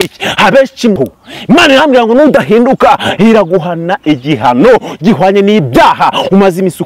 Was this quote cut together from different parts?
yes; 1 cut; at 1.0 s

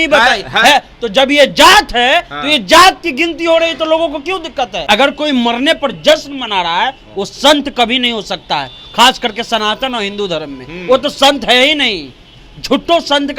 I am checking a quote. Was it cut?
yes; 1 cut; at 4.8 s

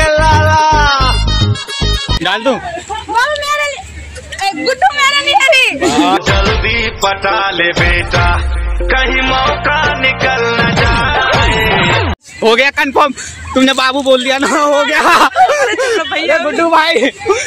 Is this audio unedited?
no; 1 cut; at 2.2 s

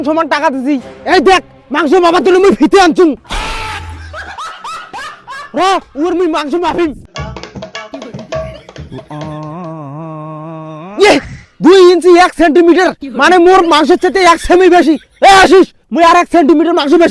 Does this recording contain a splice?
no; 0 cuts

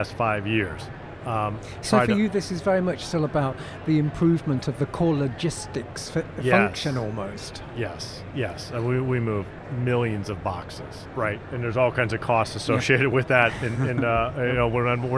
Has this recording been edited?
no; 0 cuts

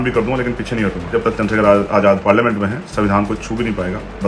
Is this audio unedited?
no; 1 cut; at 1.1 s

